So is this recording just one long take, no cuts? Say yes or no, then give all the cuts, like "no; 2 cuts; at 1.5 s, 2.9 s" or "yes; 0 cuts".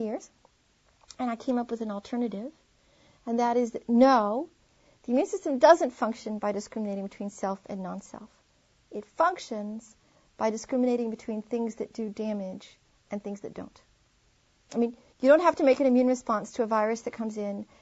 yes; 0 cuts